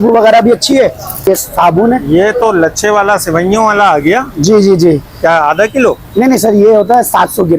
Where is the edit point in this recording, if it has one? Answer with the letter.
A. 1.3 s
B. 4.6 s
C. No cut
A